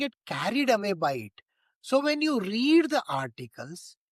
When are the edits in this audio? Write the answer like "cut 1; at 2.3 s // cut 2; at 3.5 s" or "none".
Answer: none